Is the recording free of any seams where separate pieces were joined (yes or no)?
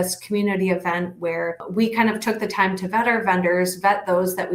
no